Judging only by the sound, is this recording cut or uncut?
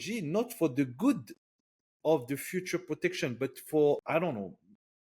cut